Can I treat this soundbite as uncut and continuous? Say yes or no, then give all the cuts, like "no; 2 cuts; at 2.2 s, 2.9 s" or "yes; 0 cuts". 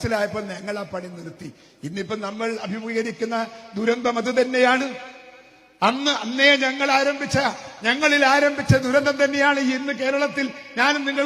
yes; 0 cuts